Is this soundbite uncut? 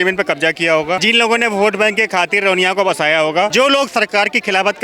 no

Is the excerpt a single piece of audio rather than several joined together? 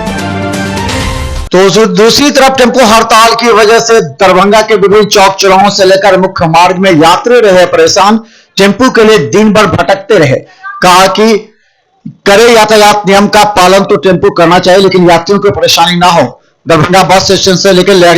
yes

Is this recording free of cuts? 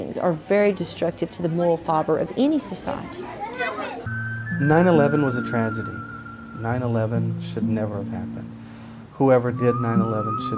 no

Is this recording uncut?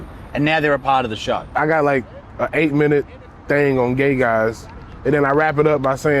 no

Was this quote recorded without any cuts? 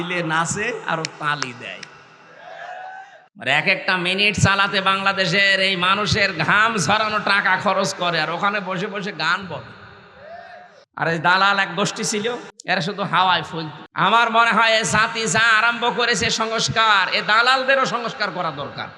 no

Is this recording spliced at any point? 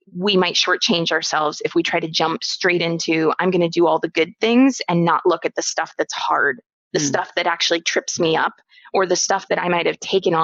no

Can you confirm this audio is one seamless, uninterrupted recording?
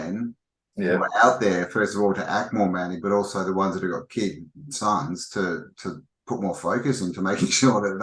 yes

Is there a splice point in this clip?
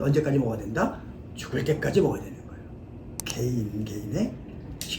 yes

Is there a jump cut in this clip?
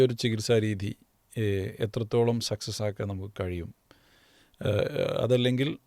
no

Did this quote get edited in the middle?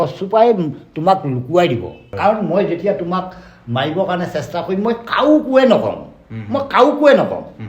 yes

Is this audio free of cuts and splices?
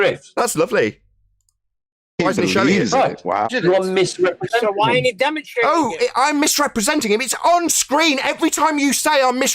no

